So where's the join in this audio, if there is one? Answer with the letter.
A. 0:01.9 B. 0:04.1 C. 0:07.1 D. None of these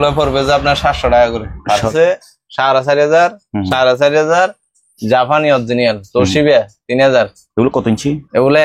A